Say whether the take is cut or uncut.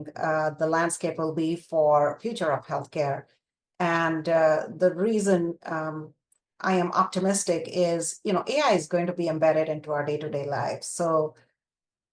uncut